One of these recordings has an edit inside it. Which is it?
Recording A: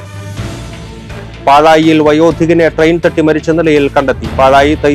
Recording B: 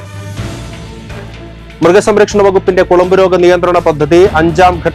B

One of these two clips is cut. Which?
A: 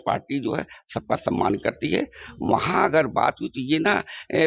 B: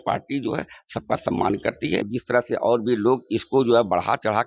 B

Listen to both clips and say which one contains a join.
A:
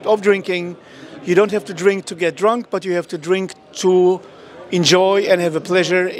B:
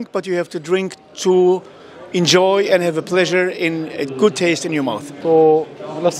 B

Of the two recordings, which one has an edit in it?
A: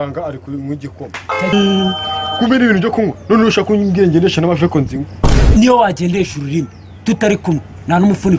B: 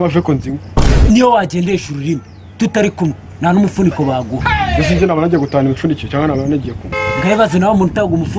A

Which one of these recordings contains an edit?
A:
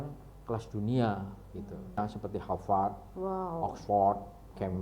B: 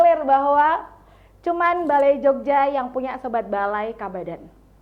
A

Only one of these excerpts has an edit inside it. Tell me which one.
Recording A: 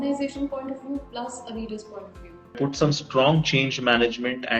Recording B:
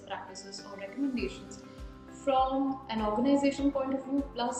A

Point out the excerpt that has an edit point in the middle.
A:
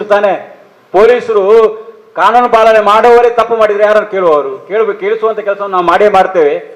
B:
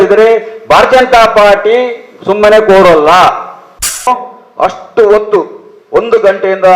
B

